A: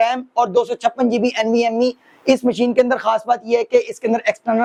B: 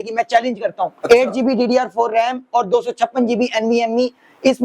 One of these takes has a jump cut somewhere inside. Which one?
B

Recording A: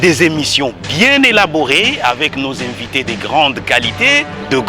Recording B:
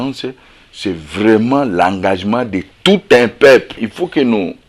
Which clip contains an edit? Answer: B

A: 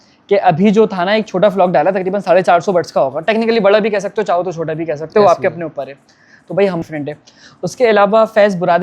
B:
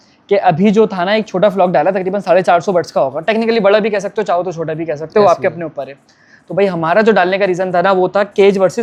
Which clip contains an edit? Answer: A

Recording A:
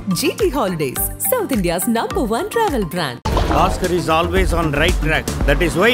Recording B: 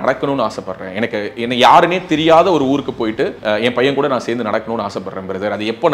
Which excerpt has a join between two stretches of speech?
B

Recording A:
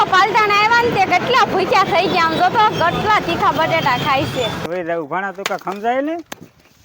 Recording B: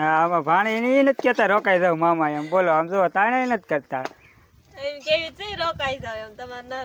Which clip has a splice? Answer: A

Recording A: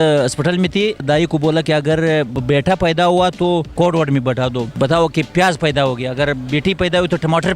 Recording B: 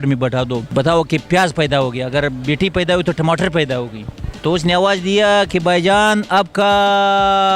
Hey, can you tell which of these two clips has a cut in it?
A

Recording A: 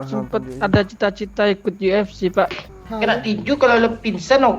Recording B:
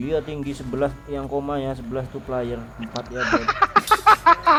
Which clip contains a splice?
A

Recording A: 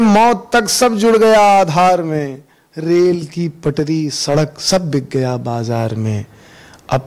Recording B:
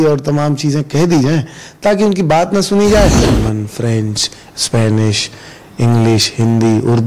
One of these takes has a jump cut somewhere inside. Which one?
B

